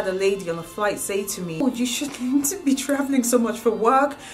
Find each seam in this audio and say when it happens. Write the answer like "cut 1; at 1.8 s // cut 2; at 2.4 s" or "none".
cut 1; at 1.6 s